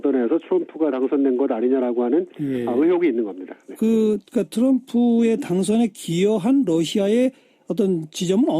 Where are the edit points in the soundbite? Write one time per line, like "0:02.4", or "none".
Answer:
0:02.7